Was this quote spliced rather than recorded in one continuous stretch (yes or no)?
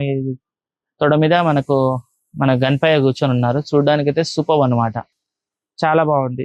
no